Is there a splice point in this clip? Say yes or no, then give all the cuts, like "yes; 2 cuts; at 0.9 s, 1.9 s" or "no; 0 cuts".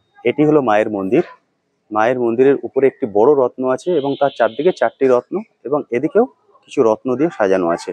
no; 0 cuts